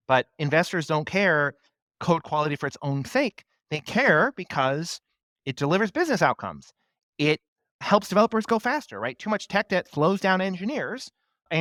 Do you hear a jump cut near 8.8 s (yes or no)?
no